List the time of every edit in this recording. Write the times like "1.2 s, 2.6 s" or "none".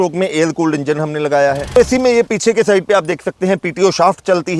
1.8 s